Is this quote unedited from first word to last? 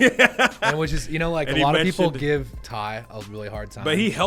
yes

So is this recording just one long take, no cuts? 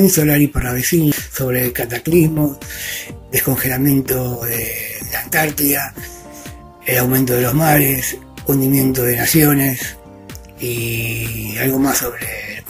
no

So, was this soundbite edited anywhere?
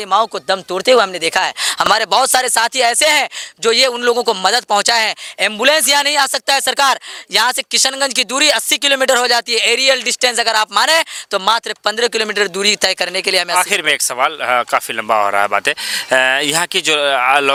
no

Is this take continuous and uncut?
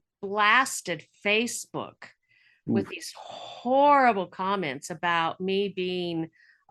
yes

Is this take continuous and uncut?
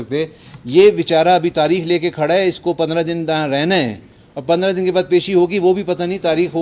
yes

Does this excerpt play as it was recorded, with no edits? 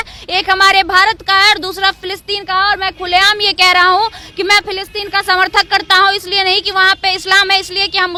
yes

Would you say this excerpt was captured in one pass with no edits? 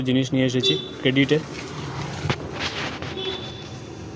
yes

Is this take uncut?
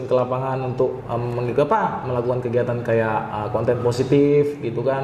yes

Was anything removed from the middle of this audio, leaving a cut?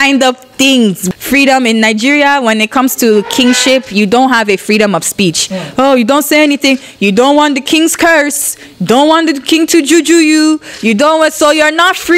yes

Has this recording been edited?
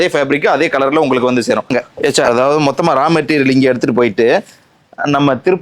yes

